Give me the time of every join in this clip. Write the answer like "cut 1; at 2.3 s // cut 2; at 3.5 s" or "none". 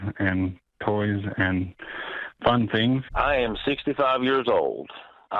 cut 1; at 3.1 s